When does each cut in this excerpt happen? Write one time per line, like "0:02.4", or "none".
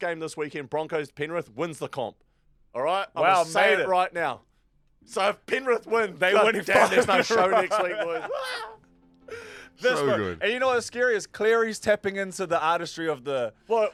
none

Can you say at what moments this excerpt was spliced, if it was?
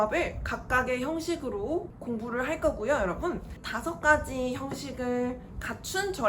0:01.9
0:03.6

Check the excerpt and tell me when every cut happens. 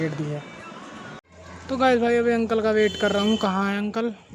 0:01.1

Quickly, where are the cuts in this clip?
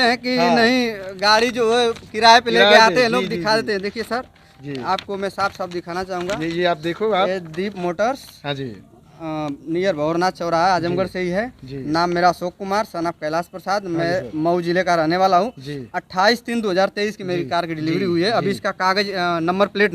none

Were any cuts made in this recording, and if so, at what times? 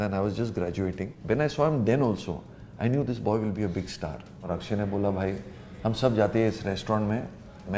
0:01.2
0:04.5

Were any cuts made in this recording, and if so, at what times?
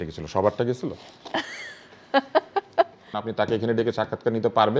0:03.2

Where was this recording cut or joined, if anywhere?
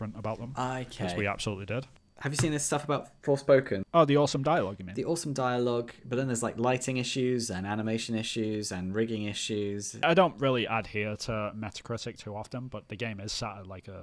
0:02.0
0:03.8
0:10.0

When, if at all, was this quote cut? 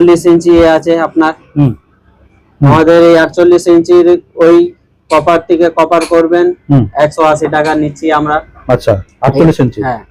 none

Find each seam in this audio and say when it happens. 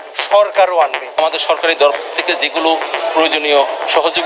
0:01.2

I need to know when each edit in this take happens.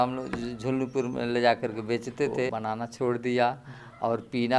0:02.5

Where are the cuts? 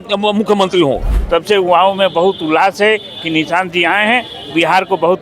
0:01.1

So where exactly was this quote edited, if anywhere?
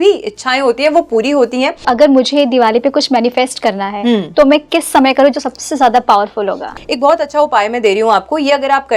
0:01.9
0:06.7

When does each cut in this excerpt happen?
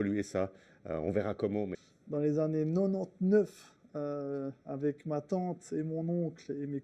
0:01.7

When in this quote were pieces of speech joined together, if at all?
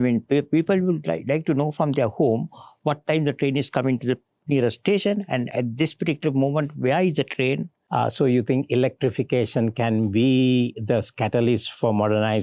0:05.5
0:07.8

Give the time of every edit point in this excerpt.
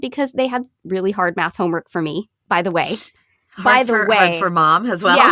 none

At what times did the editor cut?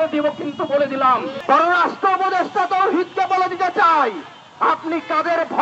0:01.3

